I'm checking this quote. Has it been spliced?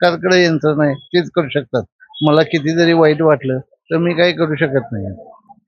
no; 0 cuts

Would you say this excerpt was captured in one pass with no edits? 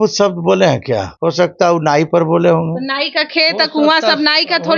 no; 1 cut; at 1.1 s

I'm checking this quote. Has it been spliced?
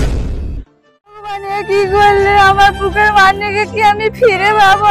yes; 1 cut; at 1.4 s

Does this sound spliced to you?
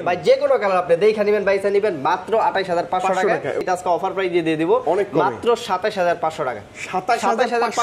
yes; 1 cut; at 3.7 s

